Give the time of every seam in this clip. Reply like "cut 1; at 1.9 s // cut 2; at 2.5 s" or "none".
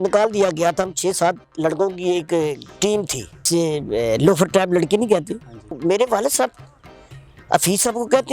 cut 1; at 3.5 s // cut 2; at 5.7 s